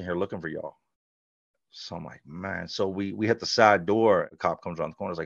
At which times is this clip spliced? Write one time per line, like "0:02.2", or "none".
0:04.3